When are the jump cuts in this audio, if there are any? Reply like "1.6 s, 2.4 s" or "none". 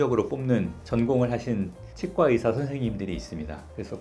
none